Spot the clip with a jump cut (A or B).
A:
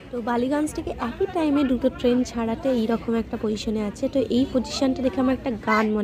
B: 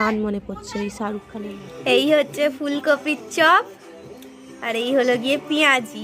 B